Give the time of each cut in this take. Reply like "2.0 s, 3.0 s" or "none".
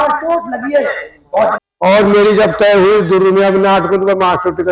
1.6 s